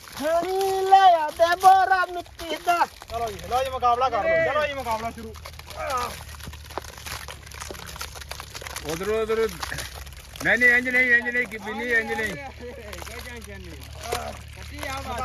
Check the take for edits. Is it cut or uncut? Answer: cut